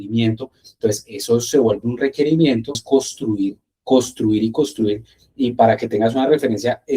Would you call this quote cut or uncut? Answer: cut